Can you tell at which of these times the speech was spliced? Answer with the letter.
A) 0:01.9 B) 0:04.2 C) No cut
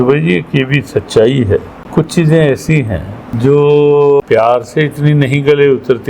B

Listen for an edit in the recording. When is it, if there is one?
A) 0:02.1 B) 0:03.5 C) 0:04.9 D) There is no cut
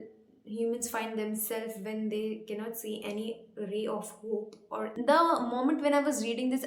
C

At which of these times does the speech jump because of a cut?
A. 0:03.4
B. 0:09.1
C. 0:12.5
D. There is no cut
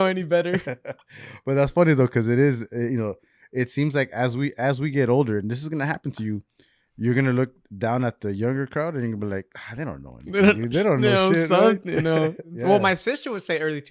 C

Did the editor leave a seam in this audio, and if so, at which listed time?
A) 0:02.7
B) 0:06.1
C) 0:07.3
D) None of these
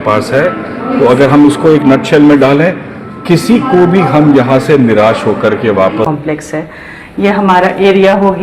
B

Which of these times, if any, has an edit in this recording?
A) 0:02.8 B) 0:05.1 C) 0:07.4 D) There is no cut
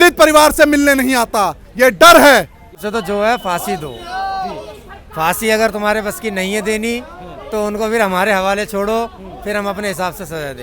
A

